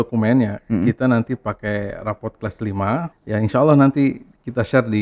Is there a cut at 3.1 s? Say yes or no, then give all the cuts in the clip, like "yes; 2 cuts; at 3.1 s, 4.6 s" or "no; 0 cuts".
yes; 1 cut; at 3.1 s